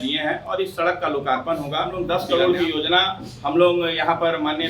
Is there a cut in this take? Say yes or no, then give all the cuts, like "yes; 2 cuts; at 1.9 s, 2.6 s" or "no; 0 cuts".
yes; 1 cut; at 2.0 s